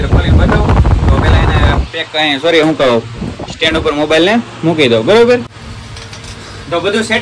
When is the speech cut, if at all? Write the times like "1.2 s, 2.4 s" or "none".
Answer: none